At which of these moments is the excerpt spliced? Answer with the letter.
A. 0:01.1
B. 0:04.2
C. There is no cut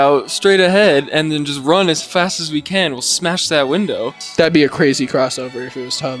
B